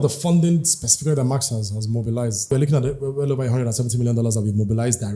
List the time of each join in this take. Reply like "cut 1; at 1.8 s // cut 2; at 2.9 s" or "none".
cut 1; at 2.5 s